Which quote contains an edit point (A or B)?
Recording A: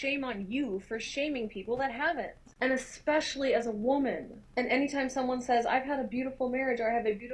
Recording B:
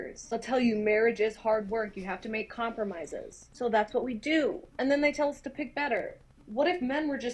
A